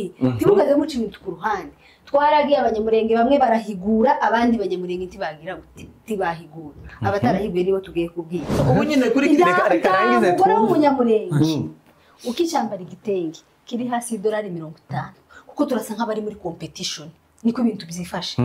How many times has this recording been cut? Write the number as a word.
one